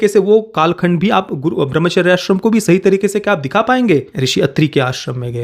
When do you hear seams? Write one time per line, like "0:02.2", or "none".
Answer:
0:04.1